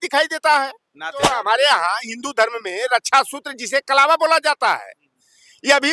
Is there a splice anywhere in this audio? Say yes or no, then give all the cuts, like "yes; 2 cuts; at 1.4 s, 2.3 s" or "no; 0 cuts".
yes; 1 cut; at 1.3 s